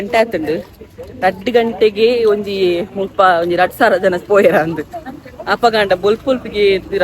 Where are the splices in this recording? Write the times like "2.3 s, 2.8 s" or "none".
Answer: none